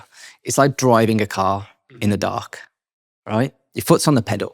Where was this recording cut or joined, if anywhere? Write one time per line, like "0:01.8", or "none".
0:03.6